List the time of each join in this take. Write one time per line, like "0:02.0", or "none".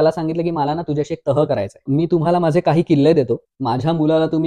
0:01.8
0:03.5